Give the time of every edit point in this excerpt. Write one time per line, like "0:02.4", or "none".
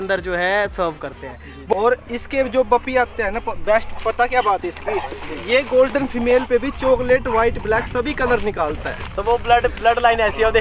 0:01.8